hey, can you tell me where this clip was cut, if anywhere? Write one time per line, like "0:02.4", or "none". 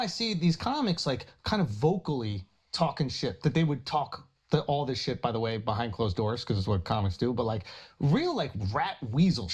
none